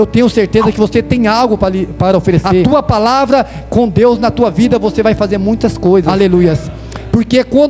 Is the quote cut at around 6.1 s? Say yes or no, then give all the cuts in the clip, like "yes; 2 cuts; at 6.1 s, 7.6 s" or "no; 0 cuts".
yes; 2 cuts; at 2.6 s, 6.1 s